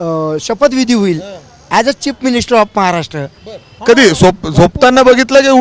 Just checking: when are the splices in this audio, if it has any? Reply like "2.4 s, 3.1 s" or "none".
3.7 s